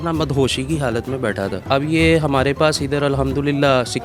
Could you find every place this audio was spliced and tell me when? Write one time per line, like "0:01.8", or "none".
0:01.6

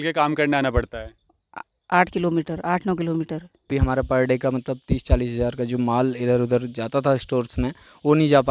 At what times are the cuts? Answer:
0:03.8

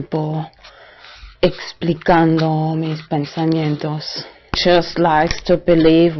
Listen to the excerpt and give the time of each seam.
0:02.2

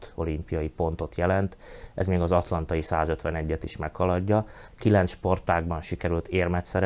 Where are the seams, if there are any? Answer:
0:04.6

